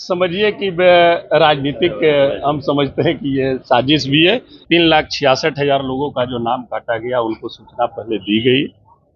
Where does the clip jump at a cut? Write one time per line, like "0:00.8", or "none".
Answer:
0:04.6